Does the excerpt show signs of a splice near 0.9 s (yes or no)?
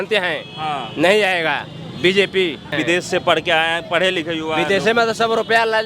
no